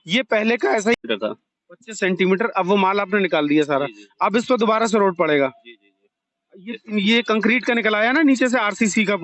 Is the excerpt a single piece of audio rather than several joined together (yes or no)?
no